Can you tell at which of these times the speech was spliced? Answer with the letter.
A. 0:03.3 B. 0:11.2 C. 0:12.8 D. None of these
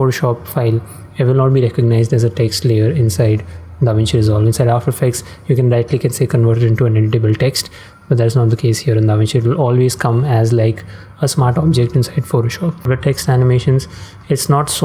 C